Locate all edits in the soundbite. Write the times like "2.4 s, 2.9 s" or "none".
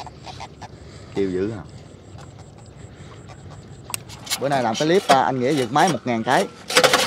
4.2 s